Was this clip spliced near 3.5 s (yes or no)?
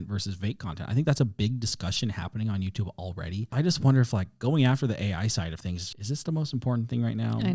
yes